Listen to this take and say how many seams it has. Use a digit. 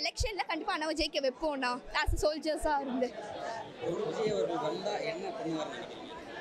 0